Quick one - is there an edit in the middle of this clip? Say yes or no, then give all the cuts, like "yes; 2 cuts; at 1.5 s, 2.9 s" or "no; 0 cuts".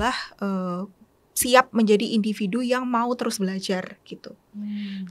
no; 0 cuts